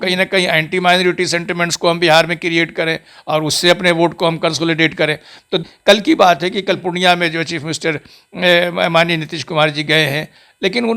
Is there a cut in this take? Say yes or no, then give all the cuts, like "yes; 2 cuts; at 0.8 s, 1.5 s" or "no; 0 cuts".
yes; 1 cut; at 5.6 s